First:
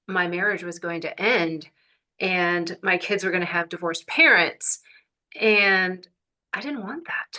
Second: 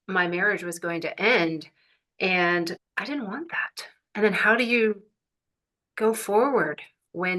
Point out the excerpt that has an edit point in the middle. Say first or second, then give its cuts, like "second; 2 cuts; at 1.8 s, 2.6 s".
second; 1 cut; at 2.8 s